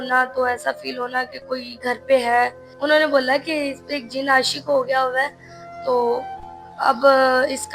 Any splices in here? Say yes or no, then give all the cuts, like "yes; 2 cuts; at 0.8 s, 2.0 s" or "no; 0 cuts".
yes; 1 cut; at 2.7 s